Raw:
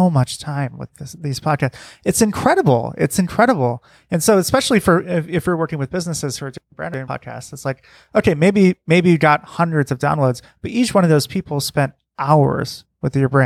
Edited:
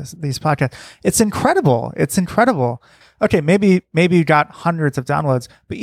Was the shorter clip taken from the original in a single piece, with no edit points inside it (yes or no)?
no